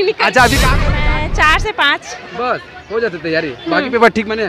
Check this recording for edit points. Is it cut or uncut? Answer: cut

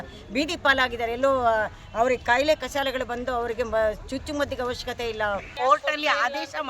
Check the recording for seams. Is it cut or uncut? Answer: cut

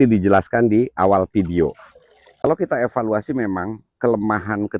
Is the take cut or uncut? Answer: cut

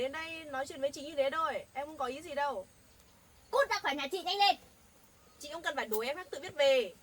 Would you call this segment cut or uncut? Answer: uncut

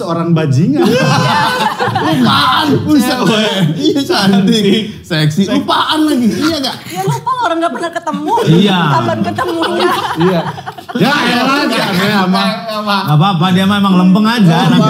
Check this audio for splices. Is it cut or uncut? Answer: uncut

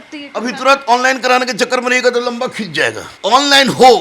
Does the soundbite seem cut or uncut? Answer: cut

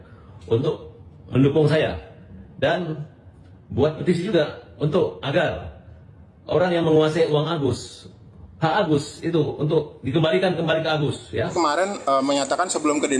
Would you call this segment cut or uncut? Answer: cut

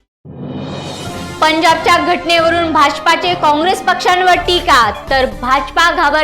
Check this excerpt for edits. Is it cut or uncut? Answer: cut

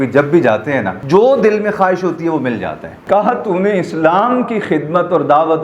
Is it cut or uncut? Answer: cut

